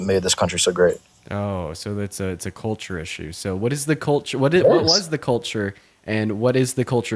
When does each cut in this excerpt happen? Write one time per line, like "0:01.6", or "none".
none